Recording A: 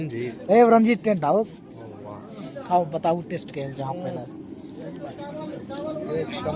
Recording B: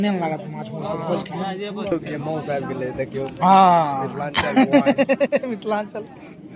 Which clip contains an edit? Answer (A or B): B